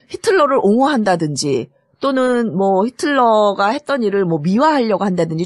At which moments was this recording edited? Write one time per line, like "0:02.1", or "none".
0:02.1